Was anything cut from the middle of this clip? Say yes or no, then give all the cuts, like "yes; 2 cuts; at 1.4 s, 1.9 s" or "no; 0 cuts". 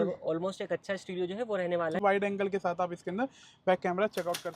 yes; 1 cut; at 2.0 s